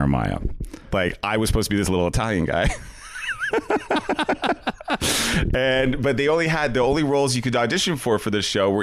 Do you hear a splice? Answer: no; 0 cuts

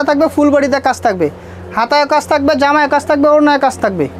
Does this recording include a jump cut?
no; 0 cuts

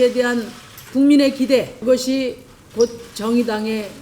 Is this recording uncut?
no; 1 cut; at 1.7 s

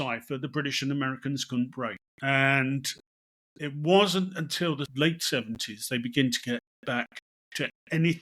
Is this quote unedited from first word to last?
no; 2 cuts; at 2.1 s, 4.9 s

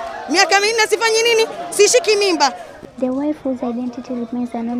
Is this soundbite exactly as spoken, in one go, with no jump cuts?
yes; 0 cuts

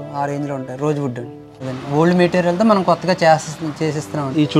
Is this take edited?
yes; 1 cut; at 1.6 s

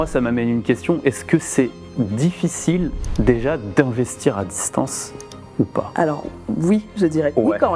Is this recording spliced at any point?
no; 0 cuts

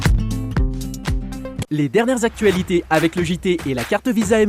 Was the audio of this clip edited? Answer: yes; 1 cut; at 1.7 s

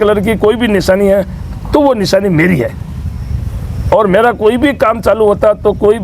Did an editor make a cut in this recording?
no; 0 cuts

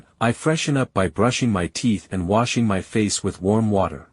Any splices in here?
yes; 1 cut; at 2.1 s

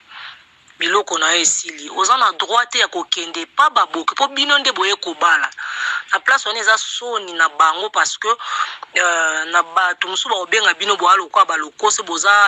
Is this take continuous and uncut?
yes; 0 cuts

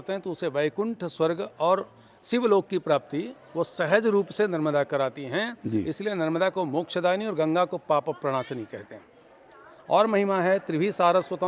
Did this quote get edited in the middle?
no; 0 cuts

